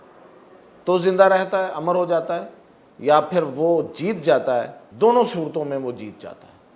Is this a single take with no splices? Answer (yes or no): no